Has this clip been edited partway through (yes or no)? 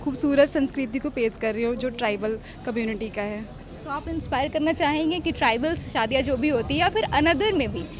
no